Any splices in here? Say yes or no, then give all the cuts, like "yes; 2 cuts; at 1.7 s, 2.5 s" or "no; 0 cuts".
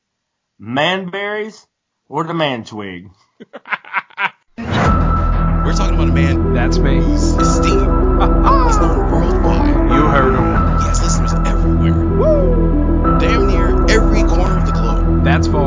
yes; 1 cut; at 4.4 s